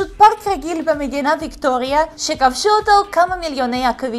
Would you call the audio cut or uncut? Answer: uncut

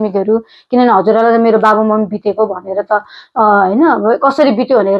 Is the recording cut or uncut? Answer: uncut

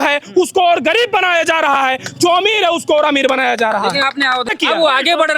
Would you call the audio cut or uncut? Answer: cut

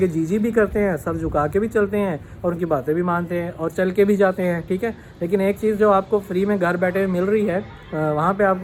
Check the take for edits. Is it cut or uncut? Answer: uncut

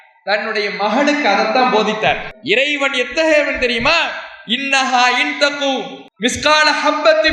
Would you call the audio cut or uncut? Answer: cut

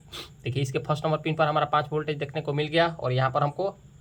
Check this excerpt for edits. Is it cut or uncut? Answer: uncut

